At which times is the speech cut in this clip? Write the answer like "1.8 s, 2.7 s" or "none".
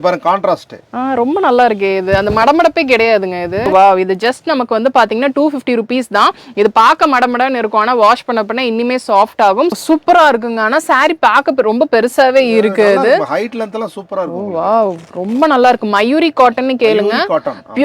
3.7 s, 9.7 s